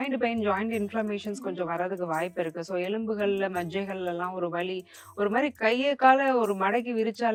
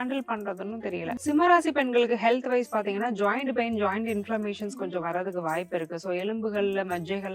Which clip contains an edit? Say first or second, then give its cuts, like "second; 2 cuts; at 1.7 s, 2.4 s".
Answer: second; 1 cut; at 1.2 s